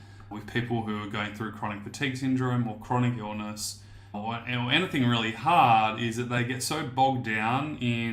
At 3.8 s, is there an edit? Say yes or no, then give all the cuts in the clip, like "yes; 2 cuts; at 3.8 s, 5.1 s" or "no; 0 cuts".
no; 0 cuts